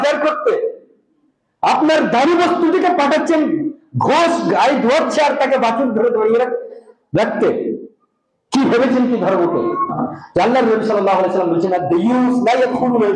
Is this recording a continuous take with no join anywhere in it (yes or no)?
no